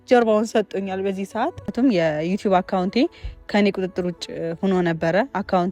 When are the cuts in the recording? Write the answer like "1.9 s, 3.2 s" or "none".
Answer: 1.7 s